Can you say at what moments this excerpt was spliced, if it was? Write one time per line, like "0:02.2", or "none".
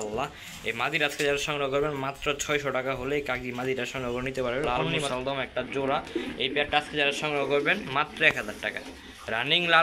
0:04.9